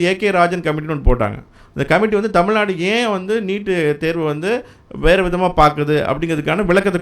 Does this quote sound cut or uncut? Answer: uncut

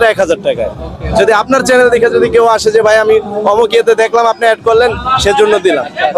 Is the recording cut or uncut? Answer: uncut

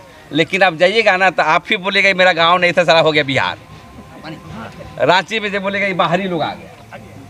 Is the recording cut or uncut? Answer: uncut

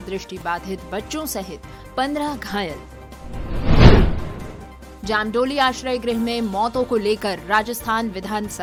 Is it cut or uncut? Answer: uncut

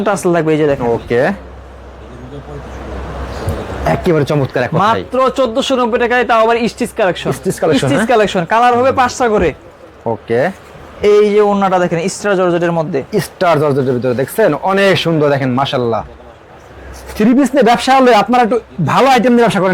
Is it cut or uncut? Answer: uncut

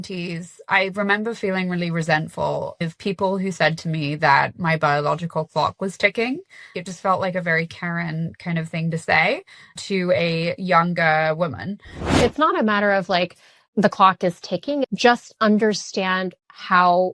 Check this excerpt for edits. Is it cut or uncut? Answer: cut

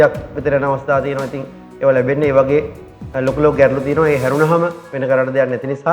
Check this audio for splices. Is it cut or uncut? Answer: cut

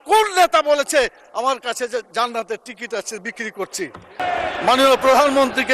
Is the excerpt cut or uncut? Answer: cut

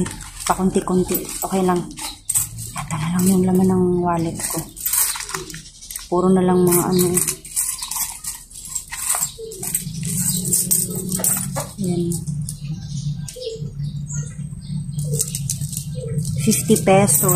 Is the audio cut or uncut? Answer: uncut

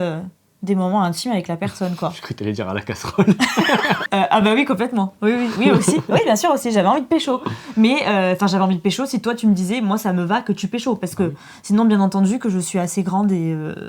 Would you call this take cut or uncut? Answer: uncut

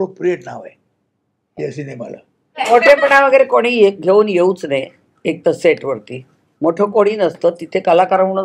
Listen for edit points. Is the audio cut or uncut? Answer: cut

